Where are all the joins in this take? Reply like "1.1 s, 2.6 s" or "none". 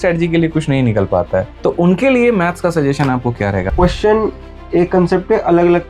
3.6 s